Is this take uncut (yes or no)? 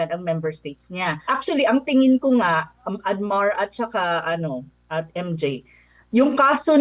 no